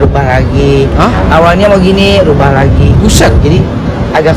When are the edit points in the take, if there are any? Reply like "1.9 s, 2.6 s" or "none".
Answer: none